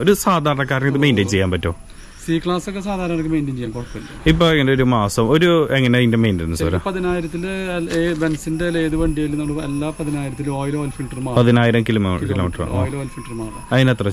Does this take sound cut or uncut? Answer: uncut